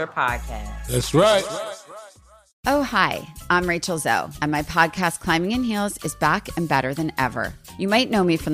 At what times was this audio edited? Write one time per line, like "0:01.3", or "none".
0:02.6